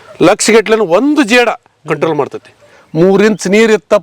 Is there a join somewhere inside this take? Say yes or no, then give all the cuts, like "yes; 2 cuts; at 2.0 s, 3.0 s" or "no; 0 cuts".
yes; 1 cut; at 2.8 s